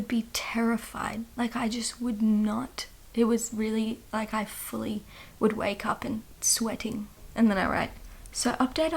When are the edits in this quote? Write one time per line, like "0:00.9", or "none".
0:07.2

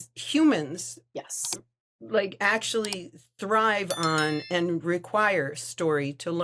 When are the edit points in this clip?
none

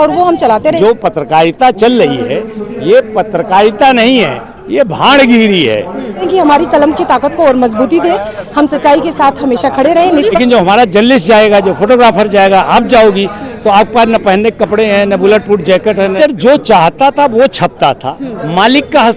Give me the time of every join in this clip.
0:00.8
0:06.2
0:10.4
0:16.1

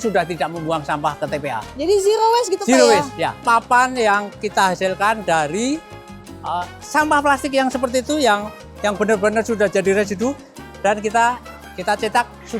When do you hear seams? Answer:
0:03.4
0:04.4

